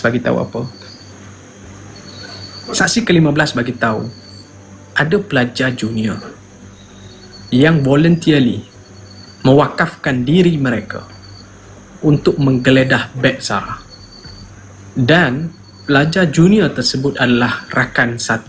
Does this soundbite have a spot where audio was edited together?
no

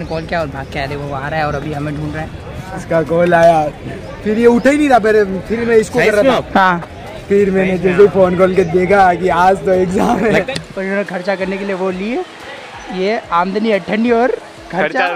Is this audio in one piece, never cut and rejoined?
no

